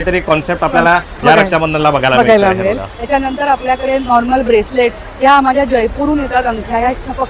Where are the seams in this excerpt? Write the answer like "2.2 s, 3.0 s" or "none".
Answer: none